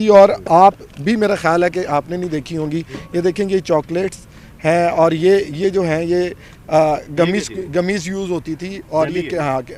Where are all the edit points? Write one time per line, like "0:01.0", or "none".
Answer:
none